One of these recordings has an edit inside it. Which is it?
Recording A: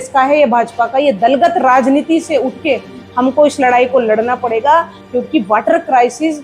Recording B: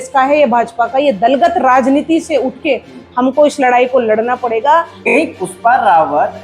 B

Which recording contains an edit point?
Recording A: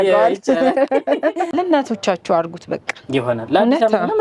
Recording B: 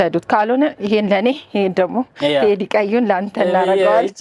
A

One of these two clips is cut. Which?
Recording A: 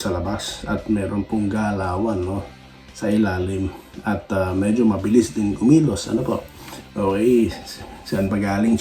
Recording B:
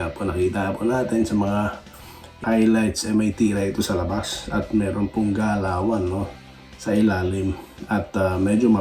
B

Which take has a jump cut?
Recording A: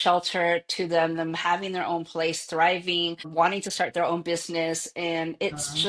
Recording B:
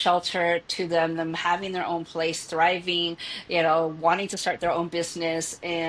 A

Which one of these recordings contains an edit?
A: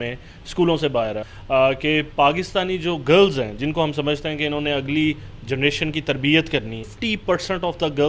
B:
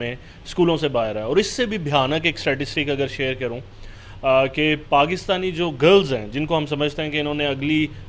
A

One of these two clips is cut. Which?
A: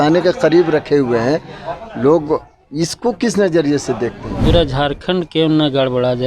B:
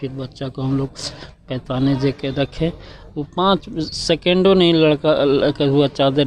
A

